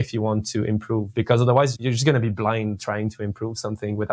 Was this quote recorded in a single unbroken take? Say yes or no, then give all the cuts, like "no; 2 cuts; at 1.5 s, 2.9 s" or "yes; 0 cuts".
no; 1 cut; at 1.8 s